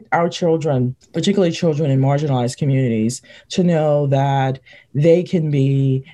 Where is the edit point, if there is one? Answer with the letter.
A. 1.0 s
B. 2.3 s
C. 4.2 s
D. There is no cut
A